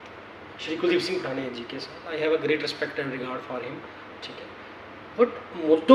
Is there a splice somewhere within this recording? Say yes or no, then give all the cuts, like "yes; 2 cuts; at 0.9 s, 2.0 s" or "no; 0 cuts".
no; 0 cuts